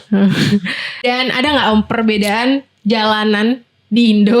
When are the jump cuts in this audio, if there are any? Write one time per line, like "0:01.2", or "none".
0:01.1